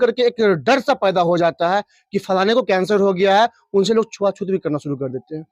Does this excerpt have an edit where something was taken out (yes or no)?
no